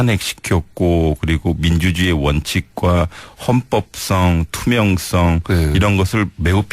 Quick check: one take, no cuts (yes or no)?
no